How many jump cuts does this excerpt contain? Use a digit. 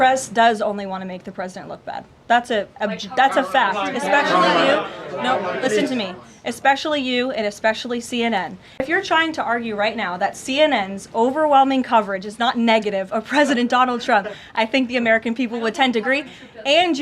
1